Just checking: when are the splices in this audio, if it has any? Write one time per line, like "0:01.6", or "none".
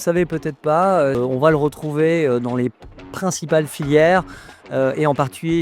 0:01.2